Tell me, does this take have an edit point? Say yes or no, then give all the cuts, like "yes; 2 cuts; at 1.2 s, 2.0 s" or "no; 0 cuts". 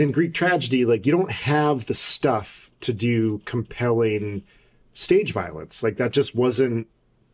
no; 0 cuts